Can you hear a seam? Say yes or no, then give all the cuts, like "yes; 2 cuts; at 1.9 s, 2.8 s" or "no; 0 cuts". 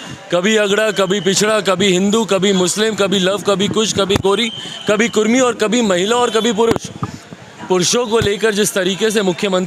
no; 0 cuts